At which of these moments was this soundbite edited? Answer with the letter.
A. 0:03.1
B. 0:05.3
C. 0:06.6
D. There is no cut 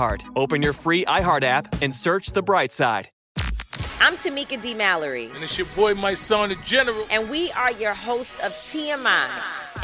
A